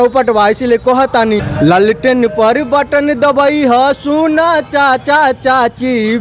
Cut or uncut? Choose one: cut